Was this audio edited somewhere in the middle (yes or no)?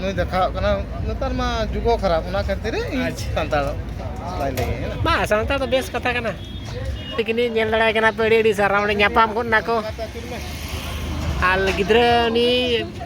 yes